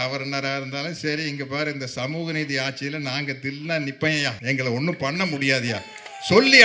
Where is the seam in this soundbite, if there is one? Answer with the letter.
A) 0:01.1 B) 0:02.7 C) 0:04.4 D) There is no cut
C